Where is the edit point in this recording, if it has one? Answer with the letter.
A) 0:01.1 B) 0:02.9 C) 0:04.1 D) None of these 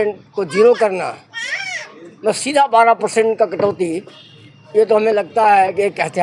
D